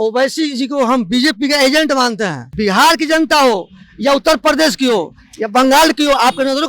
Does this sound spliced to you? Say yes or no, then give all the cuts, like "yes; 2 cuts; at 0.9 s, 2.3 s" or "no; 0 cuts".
yes; 1 cut; at 2.4 s